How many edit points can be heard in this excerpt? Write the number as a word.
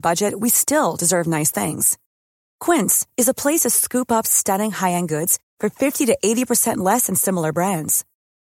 zero